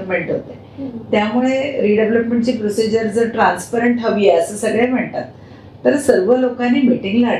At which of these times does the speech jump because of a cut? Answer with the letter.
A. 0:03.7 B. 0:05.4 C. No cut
C